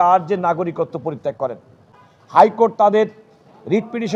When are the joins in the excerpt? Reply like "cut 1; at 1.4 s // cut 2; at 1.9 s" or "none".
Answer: none